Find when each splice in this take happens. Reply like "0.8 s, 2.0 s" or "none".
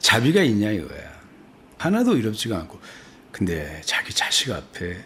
none